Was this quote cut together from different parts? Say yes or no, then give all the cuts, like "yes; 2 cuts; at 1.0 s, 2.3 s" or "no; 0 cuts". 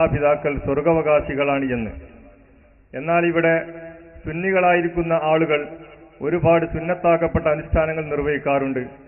no; 0 cuts